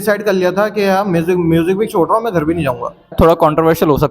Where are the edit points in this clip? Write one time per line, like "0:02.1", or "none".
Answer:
0:03.1